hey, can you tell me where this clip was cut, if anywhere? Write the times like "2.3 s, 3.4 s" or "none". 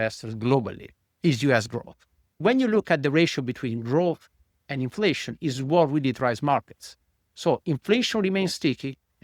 2.4 s